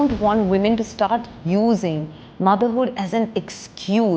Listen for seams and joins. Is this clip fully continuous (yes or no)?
yes